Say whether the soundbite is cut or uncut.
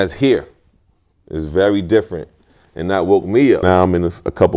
cut